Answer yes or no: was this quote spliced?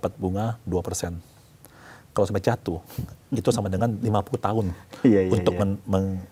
no